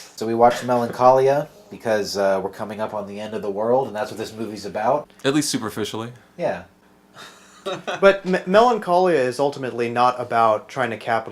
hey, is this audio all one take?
no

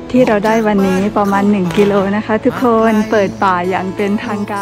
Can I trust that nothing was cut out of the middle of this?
yes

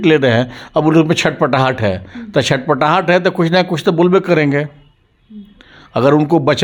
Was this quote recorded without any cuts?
yes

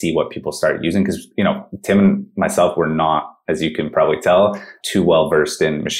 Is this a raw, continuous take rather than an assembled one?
yes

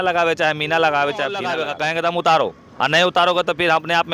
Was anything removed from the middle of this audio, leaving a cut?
yes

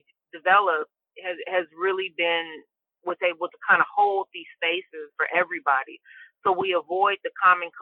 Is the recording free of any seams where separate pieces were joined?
no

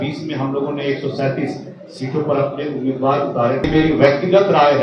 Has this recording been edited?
yes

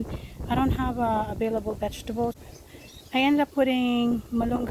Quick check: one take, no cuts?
no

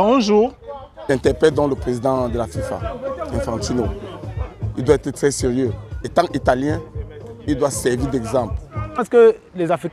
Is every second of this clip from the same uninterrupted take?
no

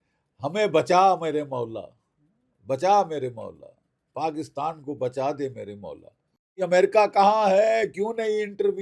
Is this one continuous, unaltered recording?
no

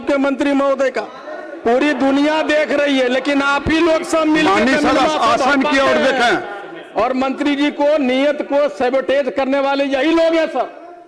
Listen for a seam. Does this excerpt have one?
no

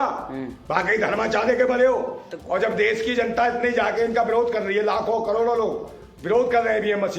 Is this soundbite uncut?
no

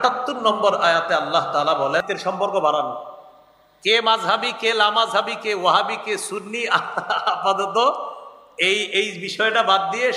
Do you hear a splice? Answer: yes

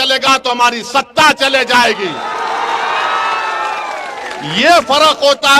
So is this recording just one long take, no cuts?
yes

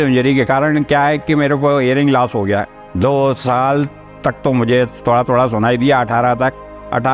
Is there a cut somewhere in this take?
no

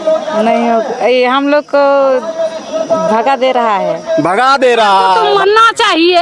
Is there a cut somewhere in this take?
yes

